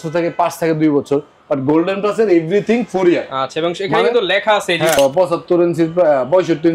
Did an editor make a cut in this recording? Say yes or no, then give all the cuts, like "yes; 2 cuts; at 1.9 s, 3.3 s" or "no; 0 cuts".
yes; 1 cut; at 5.0 s